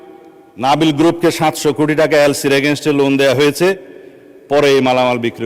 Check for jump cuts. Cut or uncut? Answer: uncut